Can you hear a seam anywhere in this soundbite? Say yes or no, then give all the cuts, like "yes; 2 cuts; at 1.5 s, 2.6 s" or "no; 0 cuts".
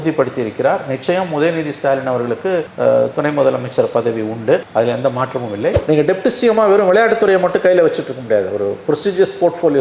yes; 1 cut; at 5.8 s